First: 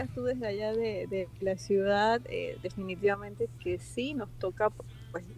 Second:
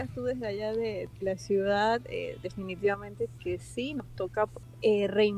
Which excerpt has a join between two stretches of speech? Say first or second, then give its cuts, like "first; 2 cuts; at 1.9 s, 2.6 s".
second; 2 cuts; at 1.1 s, 4.1 s